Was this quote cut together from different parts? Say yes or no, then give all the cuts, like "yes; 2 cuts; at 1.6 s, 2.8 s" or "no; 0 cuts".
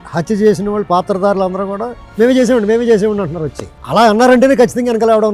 no; 0 cuts